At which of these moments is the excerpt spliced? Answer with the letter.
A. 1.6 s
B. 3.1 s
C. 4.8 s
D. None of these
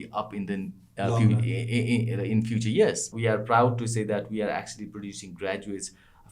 B